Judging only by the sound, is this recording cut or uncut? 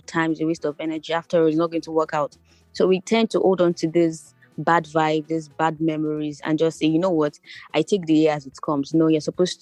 uncut